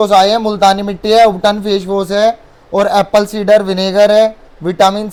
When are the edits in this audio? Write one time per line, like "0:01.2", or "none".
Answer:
none